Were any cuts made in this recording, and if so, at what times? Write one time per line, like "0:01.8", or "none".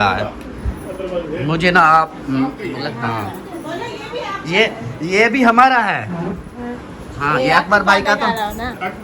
0:02.7